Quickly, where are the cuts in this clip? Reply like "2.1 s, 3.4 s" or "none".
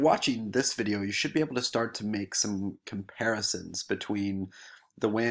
none